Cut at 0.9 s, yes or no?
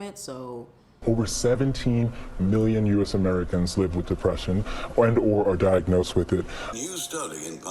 yes